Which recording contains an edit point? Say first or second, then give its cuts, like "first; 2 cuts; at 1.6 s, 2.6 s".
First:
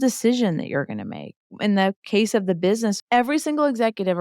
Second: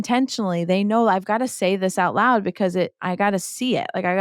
first; 2 cuts; at 1.6 s, 3.0 s